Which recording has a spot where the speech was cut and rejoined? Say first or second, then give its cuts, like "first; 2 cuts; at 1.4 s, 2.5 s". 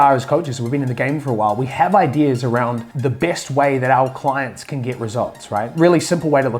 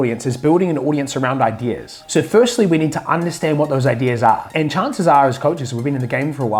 first; 2 cuts; at 2.9 s, 5.7 s